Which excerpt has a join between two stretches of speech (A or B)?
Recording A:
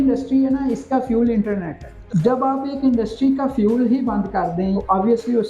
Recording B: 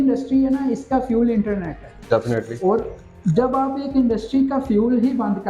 A